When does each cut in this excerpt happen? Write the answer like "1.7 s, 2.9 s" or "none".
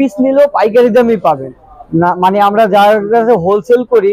none